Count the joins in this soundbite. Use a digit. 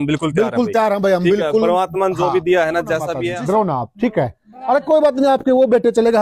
1